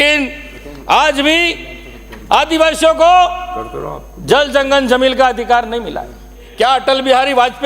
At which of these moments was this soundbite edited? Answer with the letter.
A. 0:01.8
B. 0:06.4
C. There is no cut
B